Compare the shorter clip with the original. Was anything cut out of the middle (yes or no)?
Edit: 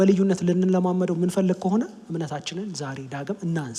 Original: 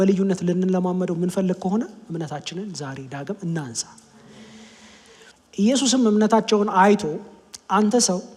no